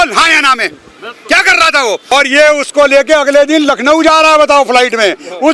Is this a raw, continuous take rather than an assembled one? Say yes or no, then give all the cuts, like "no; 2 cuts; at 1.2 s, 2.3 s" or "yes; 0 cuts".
no; 1 cut; at 2.1 s